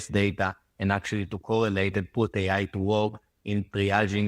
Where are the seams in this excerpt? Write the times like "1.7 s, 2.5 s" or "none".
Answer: none